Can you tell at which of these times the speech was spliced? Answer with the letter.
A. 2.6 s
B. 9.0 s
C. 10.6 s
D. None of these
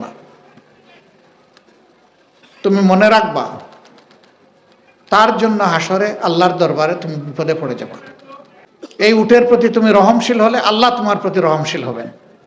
B